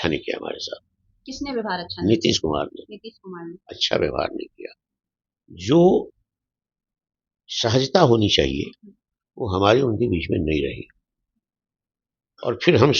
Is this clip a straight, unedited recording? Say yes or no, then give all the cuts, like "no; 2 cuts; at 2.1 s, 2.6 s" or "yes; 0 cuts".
yes; 0 cuts